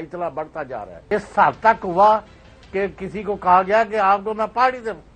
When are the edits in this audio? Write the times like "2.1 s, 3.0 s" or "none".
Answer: 1.1 s